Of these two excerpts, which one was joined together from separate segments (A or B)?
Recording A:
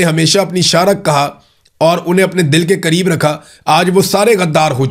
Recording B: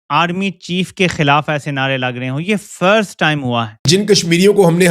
B